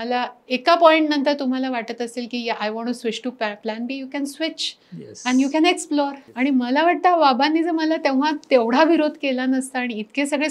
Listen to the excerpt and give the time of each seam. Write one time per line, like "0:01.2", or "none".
0:06.2